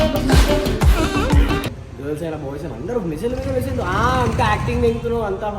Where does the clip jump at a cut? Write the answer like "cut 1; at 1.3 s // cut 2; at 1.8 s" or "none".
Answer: cut 1; at 1.8 s

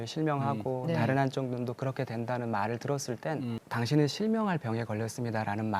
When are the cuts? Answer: cut 1; at 3.6 s

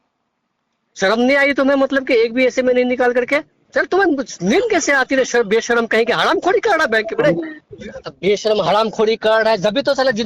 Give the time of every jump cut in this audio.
cut 1; at 3.6 s // cut 2; at 7.5 s

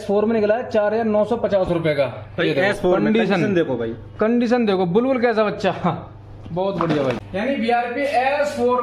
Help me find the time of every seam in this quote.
cut 1; at 7.2 s

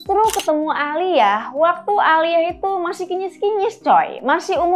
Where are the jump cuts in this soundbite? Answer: none

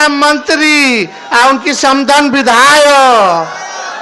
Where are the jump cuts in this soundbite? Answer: none

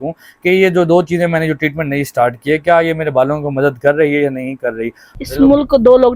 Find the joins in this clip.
cut 1; at 5.0 s

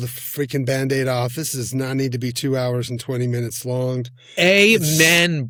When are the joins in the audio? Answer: none

